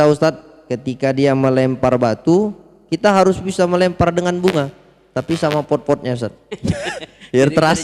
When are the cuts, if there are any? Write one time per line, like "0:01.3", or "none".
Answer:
none